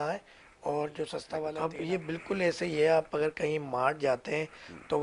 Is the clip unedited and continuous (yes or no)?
no